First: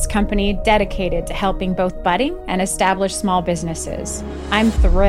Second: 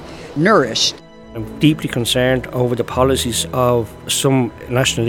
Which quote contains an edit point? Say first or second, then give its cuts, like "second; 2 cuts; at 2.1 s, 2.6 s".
second; 1 cut; at 1.0 s